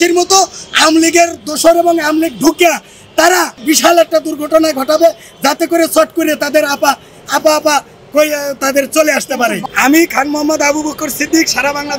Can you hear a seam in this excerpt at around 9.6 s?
yes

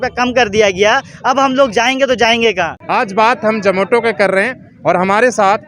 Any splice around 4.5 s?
no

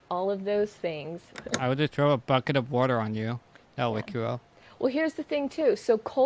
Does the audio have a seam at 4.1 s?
no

